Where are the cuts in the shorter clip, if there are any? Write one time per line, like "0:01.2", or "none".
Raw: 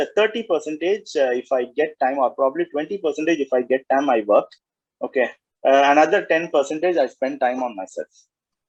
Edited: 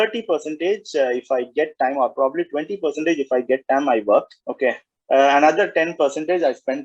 0:04.4

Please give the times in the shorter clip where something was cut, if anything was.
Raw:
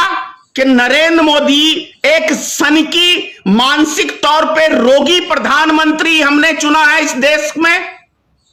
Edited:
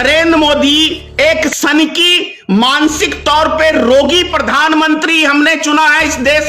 0:01.5

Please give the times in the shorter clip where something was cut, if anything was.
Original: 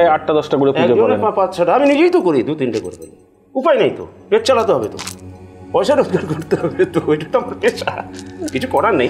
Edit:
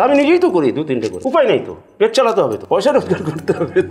0:01.2
0:02.6

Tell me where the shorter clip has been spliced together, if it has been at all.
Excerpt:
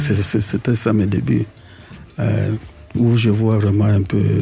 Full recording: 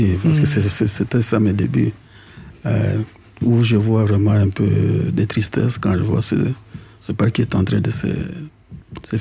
none

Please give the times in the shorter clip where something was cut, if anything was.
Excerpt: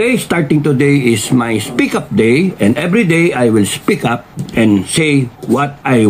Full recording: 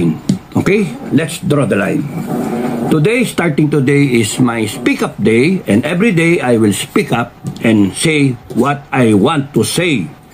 none

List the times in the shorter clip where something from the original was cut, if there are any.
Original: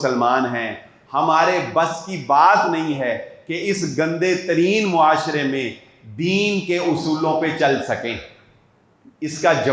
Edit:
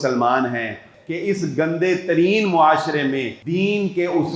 0:00.9
0:03.4

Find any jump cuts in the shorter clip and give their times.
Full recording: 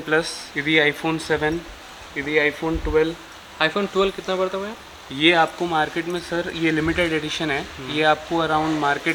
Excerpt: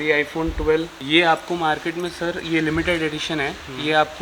0:00.9

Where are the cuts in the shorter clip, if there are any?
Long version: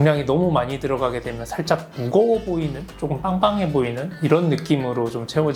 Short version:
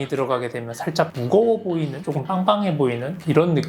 0:01.2
0:02.0

